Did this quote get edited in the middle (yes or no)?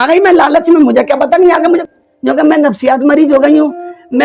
yes